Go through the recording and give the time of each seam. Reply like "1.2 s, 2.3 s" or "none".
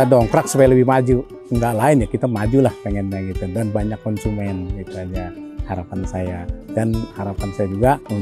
1.4 s